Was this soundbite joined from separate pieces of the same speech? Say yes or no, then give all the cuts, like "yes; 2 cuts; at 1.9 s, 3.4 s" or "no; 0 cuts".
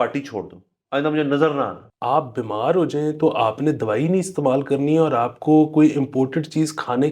yes; 1 cut; at 1.9 s